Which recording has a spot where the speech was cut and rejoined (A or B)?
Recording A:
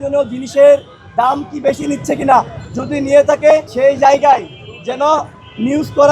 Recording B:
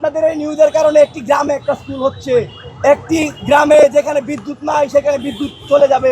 A